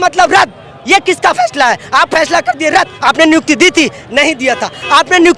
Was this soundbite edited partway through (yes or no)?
no